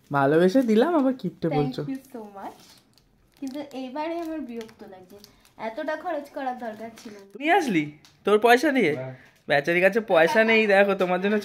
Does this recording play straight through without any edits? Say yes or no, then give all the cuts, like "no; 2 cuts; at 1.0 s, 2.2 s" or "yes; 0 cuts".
no; 1 cut; at 7.3 s